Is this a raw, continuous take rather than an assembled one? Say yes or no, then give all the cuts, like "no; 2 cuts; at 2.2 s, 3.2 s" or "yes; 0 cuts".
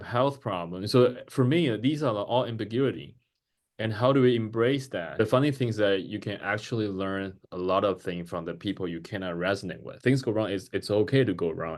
no; 2 cuts; at 5.2 s, 9.8 s